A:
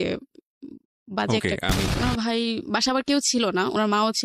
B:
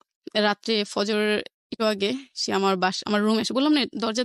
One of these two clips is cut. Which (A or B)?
A